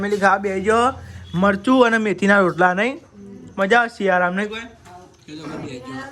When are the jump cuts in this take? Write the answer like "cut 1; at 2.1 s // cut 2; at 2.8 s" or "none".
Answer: none